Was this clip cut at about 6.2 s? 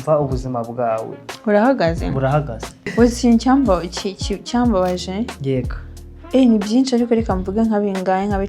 no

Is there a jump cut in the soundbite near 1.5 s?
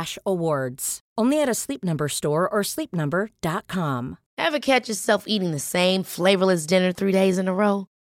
no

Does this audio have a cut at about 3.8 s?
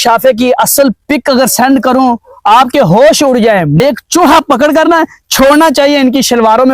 yes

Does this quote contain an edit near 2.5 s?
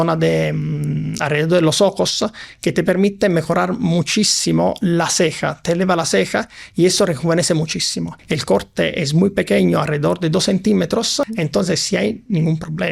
no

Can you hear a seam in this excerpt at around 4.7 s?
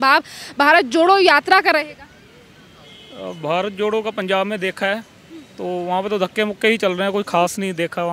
no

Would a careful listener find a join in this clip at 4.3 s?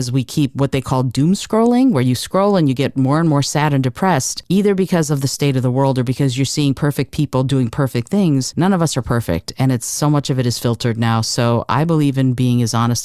yes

